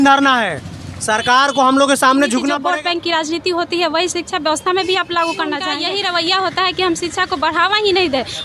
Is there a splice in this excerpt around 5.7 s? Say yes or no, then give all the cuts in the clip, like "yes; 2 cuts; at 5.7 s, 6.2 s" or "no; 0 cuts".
yes; 2 cuts; at 2.5 s, 5.7 s